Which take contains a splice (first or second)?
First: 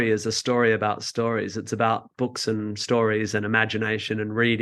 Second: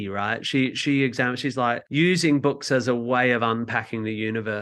second